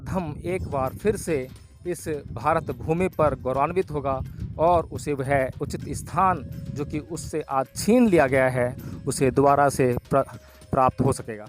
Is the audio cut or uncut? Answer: uncut